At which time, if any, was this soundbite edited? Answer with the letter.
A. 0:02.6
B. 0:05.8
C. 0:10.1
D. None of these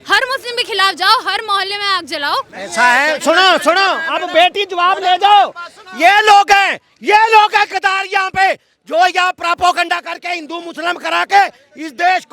A